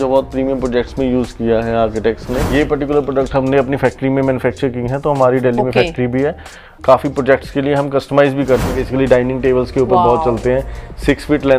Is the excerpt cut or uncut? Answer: cut